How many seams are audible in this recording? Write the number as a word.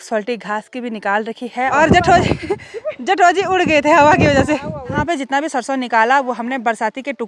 two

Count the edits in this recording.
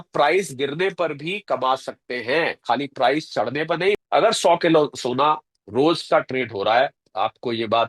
one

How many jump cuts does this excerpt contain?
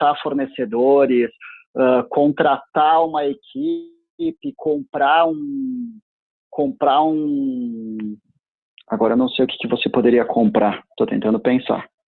zero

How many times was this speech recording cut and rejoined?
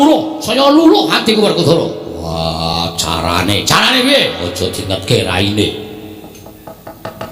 zero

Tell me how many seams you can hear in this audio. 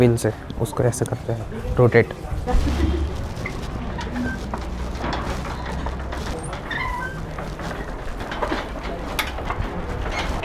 zero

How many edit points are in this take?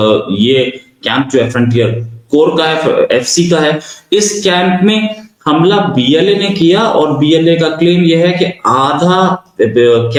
zero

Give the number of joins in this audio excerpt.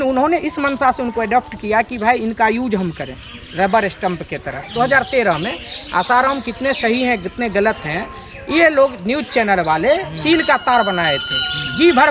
one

